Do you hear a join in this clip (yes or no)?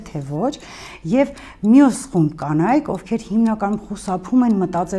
no